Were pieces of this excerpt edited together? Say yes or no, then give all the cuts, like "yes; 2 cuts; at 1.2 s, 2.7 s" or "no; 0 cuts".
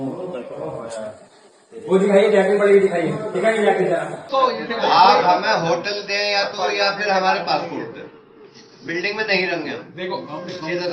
yes; 1 cut; at 4.2 s